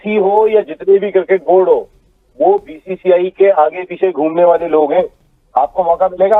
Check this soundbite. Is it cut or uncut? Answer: uncut